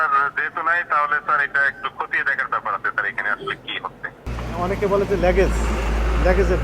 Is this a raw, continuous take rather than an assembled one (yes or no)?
no